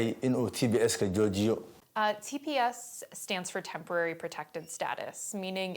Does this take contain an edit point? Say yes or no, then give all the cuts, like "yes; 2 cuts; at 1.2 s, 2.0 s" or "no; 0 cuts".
yes; 1 cut; at 1.8 s